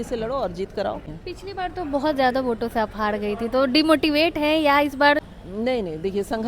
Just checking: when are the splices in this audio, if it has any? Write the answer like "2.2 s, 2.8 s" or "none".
1.1 s, 5.4 s